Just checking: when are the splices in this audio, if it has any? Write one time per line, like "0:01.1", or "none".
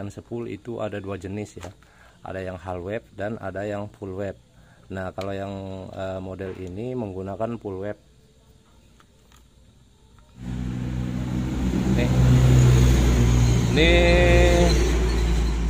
0:10.4